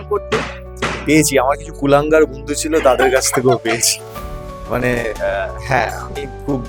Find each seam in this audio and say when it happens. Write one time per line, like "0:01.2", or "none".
none

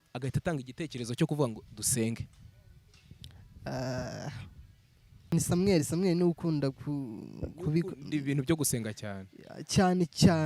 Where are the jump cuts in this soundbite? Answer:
0:05.3

